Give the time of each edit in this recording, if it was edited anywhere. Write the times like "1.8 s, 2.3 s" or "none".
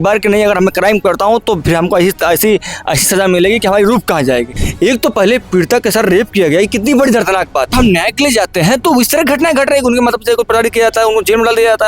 4.6 s, 7.7 s